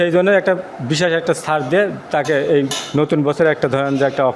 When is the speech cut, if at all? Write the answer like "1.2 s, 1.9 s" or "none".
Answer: none